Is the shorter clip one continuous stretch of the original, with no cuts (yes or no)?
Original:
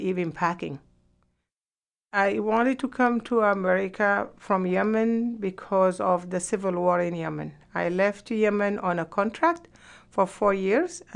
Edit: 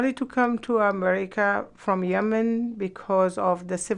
yes